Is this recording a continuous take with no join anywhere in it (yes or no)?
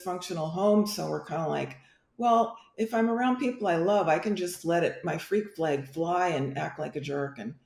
yes